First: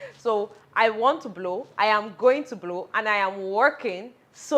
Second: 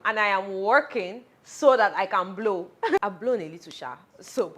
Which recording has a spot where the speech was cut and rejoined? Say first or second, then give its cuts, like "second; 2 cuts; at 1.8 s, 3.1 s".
second; 1 cut; at 2.8 s